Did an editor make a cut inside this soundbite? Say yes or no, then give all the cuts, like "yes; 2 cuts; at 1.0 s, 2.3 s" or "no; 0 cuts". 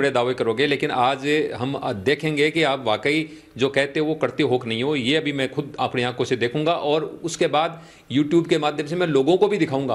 no; 0 cuts